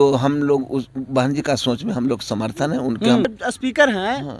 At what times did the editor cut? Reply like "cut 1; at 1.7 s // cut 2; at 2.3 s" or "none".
cut 1; at 3.2 s